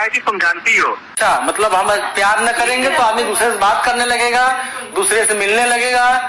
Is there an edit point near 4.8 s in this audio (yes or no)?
no